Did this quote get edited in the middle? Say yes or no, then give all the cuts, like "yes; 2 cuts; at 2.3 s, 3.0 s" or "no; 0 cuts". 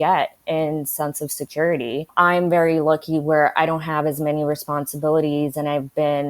yes; 1 cut; at 2.1 s